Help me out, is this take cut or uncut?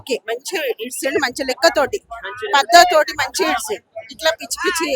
uncut